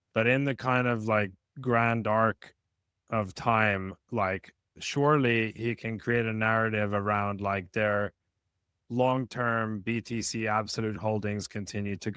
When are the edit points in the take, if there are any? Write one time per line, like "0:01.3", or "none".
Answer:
none